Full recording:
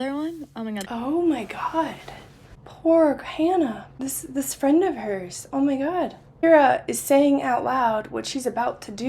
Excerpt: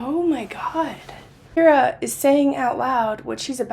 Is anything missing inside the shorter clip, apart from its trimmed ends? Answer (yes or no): yes